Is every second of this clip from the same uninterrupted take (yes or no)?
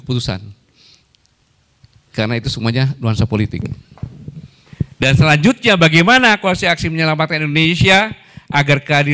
no